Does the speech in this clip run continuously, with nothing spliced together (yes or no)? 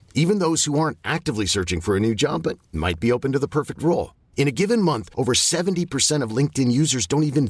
yes